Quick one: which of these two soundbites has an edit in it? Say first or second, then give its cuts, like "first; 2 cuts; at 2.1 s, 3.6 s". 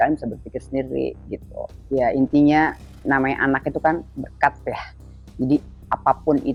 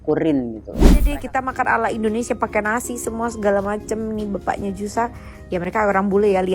second; 1 cut; at 1.1 s